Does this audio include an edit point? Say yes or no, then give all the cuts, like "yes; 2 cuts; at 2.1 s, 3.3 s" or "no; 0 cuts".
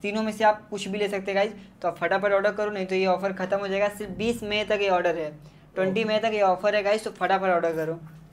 no; 0 cuts